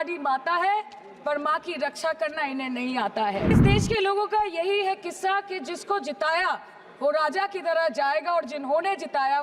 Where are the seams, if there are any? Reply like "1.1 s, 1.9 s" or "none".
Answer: 3.6 s